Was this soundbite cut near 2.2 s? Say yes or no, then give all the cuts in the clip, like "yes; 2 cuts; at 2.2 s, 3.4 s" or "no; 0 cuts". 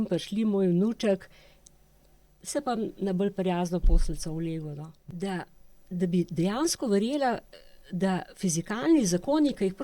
no; 1 cut; at 5.0 s